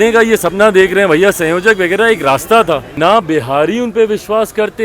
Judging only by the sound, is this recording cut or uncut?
cut